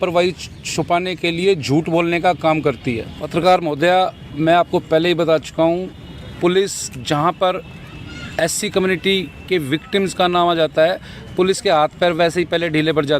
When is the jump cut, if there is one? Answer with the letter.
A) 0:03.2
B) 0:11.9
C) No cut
A